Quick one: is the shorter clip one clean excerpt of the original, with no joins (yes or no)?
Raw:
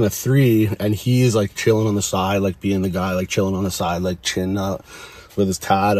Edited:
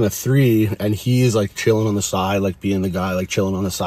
yes